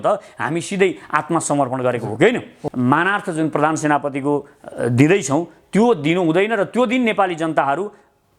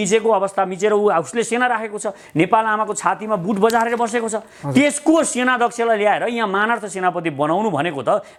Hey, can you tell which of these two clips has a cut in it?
first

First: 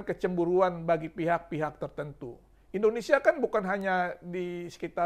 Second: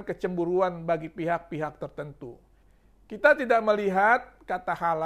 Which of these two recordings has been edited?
second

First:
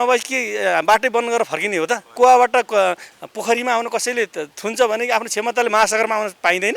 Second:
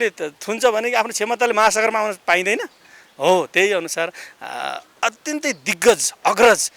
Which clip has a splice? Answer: first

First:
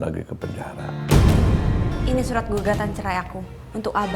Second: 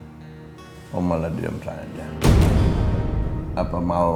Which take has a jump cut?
first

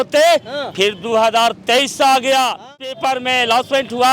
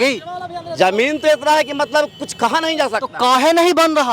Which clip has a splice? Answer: first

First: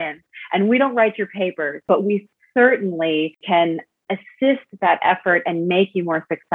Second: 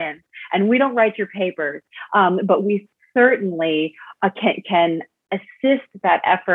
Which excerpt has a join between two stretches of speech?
first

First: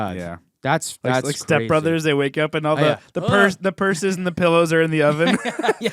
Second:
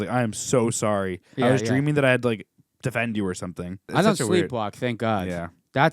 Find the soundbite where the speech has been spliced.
second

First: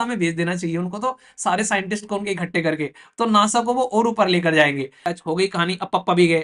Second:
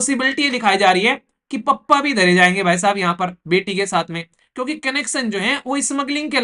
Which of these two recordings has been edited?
first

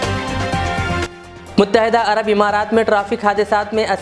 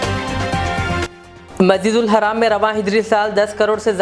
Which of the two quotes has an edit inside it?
first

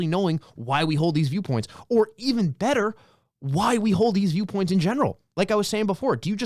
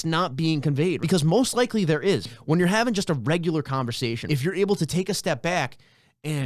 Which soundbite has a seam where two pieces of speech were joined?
second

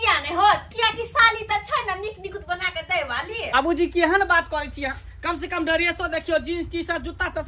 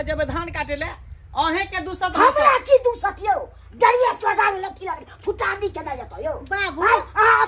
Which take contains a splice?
first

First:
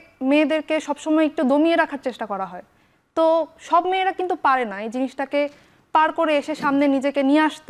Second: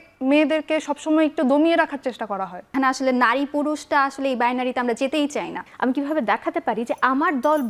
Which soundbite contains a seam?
second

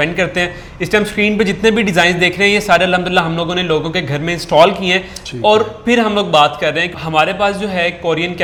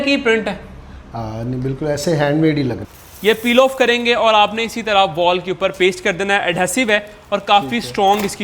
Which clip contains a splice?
second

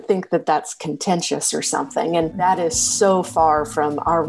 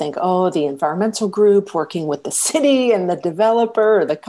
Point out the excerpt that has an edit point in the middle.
first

